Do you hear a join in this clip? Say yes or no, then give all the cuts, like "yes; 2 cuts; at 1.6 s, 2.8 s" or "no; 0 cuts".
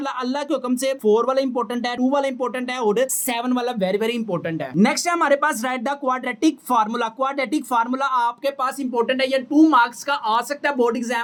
no; 0 cuts